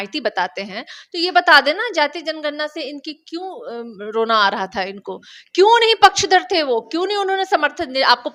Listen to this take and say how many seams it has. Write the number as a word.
zero